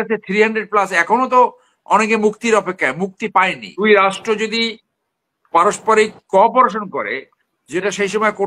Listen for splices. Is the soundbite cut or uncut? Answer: cut